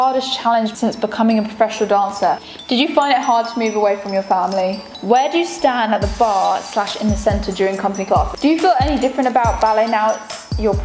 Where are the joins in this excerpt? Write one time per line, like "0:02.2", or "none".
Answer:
0:02.4
0:04.9
0:08.3